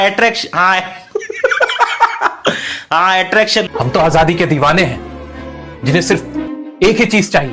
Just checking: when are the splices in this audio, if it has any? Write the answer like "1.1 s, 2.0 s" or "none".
3.7 s